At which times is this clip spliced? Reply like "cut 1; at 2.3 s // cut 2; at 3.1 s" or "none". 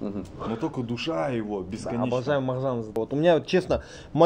cut 1; at 3.0 s